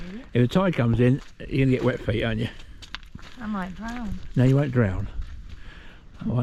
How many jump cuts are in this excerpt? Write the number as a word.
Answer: zero